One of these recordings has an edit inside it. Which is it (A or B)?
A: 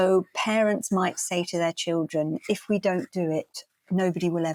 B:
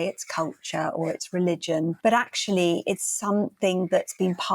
B